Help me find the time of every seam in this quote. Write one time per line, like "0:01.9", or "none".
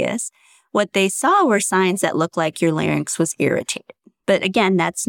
0:04.1